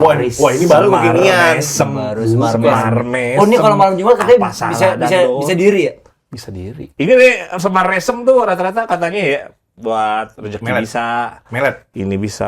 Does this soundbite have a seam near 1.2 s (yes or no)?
no